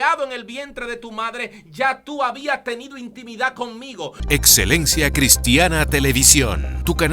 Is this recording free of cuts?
no; 1 cut; at 4.2 s

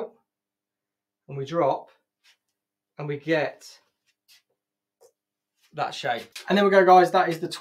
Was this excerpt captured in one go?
no; 1 cut; at 6.3 s

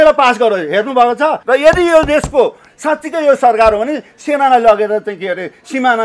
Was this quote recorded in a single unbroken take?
no; 1 cut; at 1.4 s

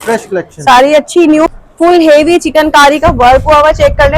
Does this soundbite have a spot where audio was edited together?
yes; 1 cut; at 1.5 s

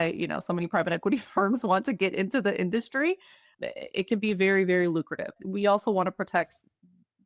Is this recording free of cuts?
no; 1 cut; at 5.4 s

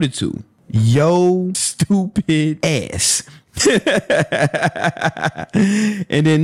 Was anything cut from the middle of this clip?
yes; 2 cuts; at 1.7 s, 2.6 s

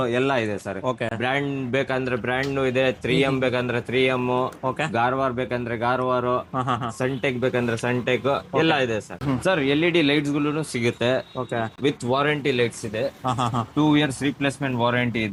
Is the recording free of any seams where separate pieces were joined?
yes; 0 cuts

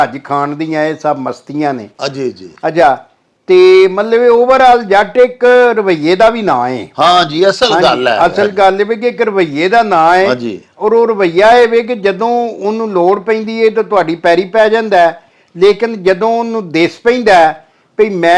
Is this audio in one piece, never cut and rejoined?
yes; 0 cuts

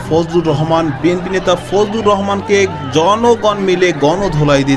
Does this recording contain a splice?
no; 0 cuts

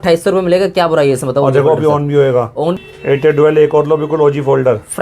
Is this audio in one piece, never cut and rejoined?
no; 1 cut; at 2.8 s

